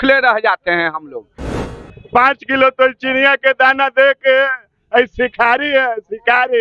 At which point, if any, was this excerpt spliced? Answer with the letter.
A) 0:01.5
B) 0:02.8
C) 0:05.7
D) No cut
A